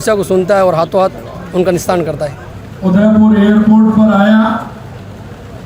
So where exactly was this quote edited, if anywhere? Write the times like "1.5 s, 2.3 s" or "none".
2.4 s